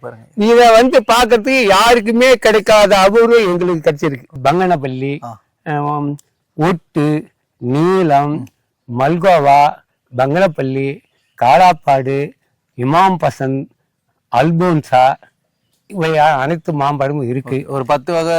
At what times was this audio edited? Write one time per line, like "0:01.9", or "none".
0:04.4

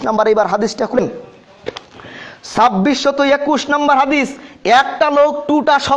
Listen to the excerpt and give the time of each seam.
0:01.0

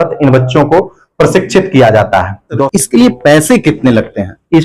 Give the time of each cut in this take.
0:02.7

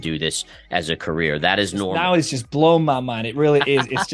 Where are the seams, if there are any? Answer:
0:01.9

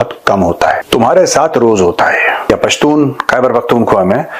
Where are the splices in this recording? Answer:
0:00.8
0:02.5

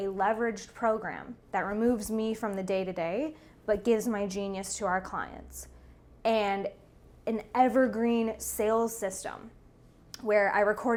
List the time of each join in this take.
none

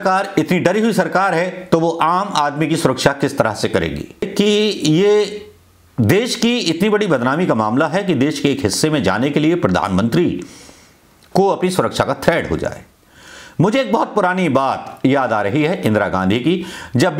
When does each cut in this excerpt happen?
0:04.3

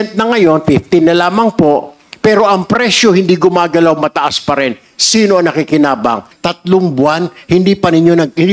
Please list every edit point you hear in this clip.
0:06.3

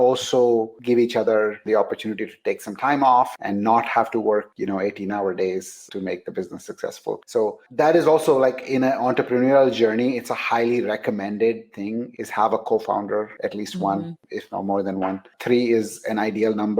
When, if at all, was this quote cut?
none

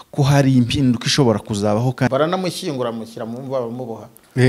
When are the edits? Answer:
0:02.1

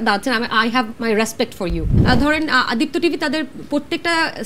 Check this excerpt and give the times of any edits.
0:01.9

